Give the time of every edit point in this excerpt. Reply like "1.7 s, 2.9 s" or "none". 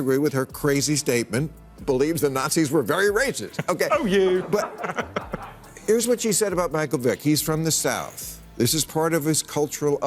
1.8 s